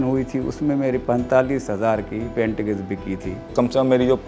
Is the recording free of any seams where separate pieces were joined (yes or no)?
no